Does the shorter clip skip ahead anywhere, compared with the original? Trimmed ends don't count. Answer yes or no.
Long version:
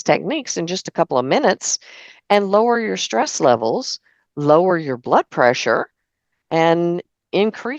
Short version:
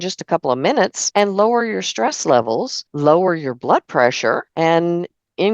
yes